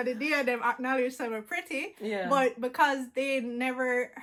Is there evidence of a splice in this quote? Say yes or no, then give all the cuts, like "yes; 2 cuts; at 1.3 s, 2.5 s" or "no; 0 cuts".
no; 0 cuts